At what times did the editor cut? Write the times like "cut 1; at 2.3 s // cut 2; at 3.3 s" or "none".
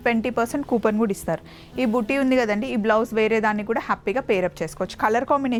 none